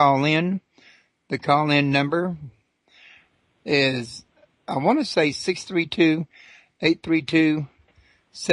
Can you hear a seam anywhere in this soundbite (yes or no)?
yes